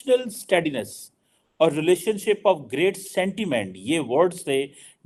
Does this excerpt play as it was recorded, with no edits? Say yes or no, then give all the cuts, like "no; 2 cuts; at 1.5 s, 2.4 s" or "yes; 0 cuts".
yes; 0 cuts